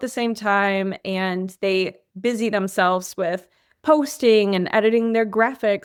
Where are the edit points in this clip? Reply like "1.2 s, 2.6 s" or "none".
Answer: none

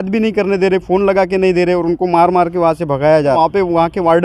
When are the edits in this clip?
3.4 s

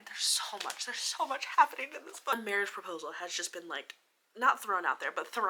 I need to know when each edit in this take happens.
none

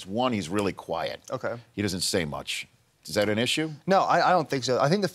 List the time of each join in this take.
2.2 s

